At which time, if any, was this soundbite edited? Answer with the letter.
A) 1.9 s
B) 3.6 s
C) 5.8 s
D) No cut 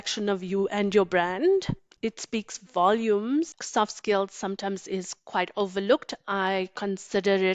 B